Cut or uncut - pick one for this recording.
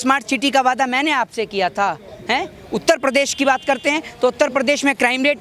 uncut